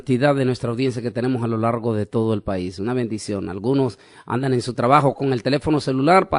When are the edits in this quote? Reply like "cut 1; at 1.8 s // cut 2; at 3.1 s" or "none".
none